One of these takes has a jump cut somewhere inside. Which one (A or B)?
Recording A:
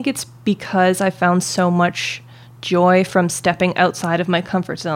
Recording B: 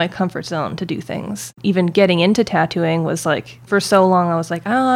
B